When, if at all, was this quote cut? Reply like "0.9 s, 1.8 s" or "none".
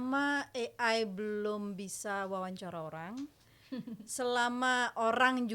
none

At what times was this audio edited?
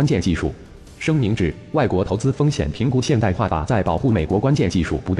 4.3 s

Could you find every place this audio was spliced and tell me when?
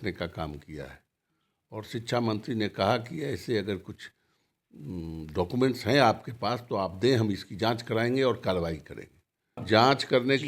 9.5 s

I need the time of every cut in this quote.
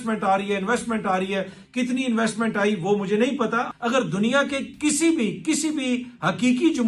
3.7 s

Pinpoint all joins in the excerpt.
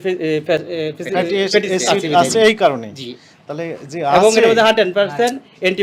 none

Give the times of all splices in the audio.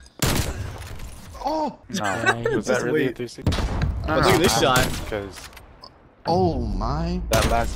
1.8 s, 3.4 s

